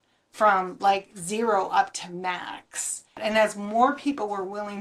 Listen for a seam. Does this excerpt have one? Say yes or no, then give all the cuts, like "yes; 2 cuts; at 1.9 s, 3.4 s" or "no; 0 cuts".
yes; 1 cut; at 3.2 s